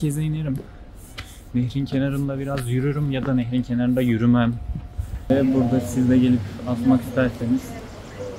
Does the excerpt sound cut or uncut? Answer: cut